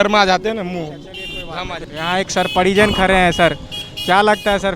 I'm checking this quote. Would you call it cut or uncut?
cut